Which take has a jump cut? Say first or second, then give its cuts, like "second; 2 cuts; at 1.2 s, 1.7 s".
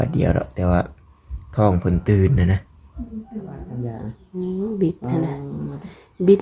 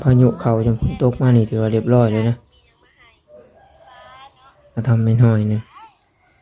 first; 1 cut; at 3.6 s